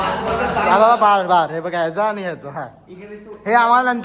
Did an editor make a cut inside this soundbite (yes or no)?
no